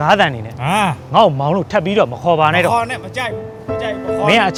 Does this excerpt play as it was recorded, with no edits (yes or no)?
yes